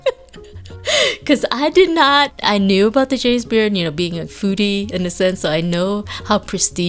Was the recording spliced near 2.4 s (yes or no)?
yes